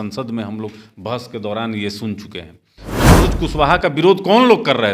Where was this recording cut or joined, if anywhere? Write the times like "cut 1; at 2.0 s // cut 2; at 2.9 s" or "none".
cut 1; at 3.1 s

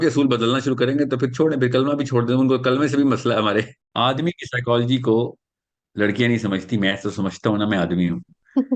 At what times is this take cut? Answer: cut 1; at 3.8 s

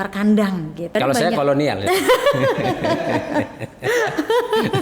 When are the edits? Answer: cut 1; at 0.9 s

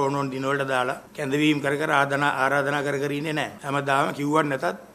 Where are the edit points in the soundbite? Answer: cut 1; at 1.1 s // cut 2; at 3.6 s

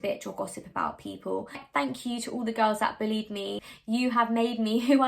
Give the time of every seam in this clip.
cut 1; at 1.6 s // cut 2; at 3.7 s

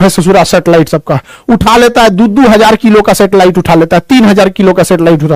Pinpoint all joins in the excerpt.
none

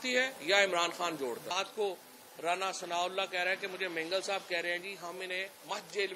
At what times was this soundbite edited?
cut 1; at 1.5 s

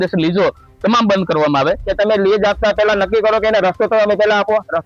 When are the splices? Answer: cut 1; at 1.8 s

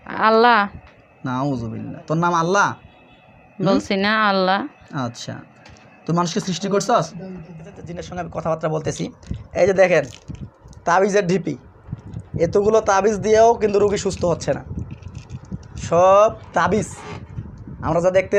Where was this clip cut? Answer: cut 1; at 8.0 s

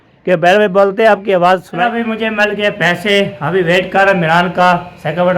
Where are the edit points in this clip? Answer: cut 1; at 1.7 s

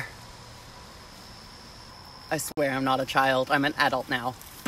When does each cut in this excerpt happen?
cut 1; at 1.9 s

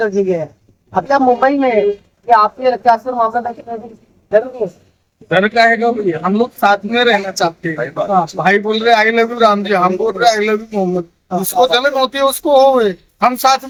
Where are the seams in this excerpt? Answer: none

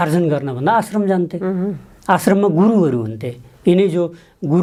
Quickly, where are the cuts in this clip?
none

